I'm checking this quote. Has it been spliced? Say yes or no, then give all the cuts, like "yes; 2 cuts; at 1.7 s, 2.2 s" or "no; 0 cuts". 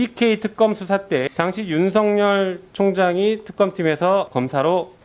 yes; 2 cuts; at 1.2 s, 4.3 s